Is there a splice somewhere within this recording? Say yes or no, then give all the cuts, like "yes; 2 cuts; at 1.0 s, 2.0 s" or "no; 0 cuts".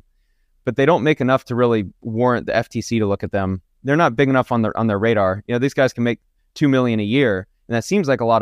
no; 0 cuts